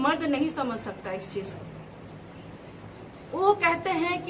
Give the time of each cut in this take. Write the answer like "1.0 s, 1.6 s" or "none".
none